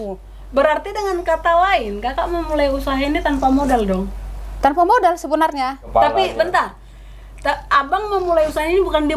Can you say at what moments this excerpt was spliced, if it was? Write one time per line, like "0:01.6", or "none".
0:05.8